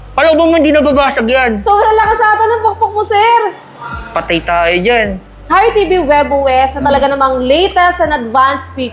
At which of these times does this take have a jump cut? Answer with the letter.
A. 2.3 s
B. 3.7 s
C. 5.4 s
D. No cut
C